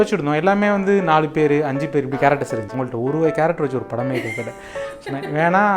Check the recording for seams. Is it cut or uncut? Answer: cut